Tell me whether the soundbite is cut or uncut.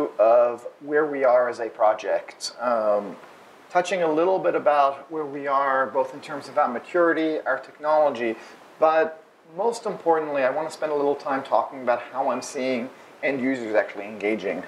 uncut